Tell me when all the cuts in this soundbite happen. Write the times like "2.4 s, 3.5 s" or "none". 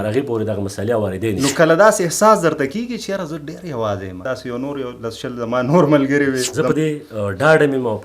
1.4 s, 4.2 s, 6.5 s